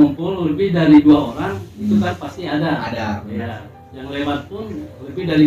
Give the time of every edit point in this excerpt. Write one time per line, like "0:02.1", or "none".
none